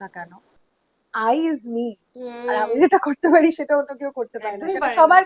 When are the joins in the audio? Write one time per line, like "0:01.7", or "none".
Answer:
none